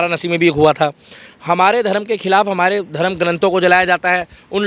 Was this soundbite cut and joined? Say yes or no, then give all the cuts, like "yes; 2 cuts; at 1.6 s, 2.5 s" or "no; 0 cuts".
no; 0 cuts